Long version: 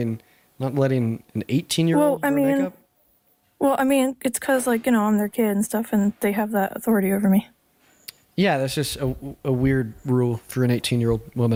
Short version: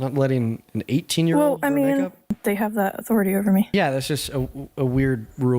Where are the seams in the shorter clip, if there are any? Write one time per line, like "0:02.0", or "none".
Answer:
0:02.4
0:03.7